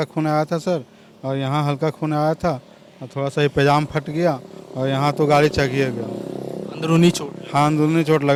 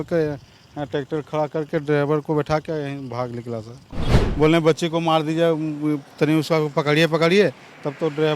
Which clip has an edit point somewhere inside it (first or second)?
second